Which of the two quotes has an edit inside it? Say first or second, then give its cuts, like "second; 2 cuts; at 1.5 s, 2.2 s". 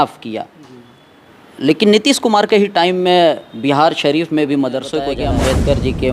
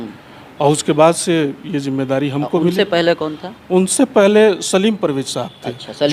first; 1 cut; at 5.1 s